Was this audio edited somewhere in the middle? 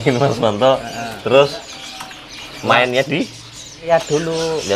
yes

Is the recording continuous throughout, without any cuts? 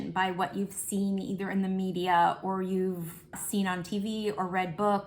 no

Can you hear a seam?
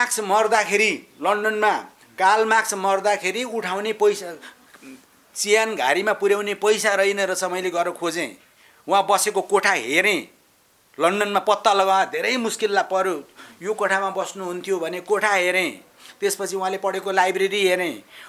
no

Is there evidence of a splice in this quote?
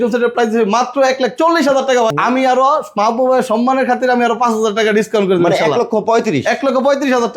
yes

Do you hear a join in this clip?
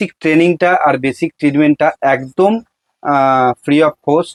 no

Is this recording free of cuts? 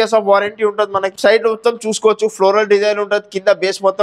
no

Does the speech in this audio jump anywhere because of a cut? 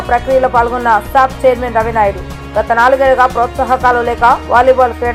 no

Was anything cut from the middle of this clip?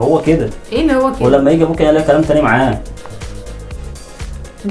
no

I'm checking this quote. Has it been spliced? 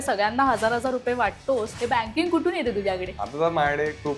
yes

